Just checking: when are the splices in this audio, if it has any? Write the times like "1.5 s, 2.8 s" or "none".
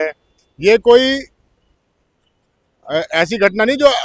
none